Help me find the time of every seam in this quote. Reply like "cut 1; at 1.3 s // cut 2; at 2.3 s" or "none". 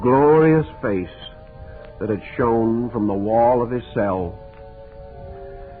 none